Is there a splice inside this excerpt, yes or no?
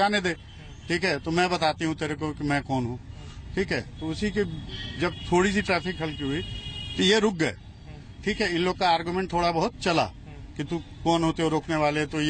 no